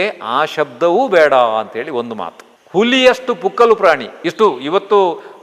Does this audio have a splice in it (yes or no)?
no